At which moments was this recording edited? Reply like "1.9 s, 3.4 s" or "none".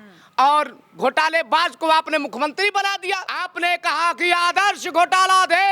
3.4 s